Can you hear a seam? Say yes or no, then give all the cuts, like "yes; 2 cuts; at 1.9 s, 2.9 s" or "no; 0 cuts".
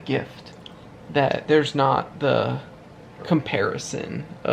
yes; 1 cut; at 1.4 s